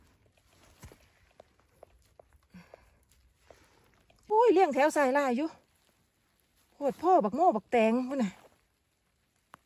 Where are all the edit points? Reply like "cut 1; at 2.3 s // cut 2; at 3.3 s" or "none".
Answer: cut 1; at 4.3 s